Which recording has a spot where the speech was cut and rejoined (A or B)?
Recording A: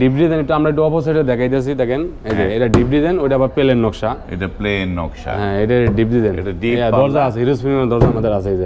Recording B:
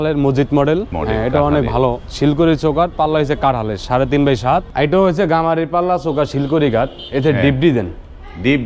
B